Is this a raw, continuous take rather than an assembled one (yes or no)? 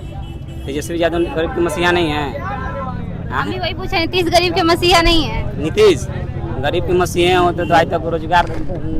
yes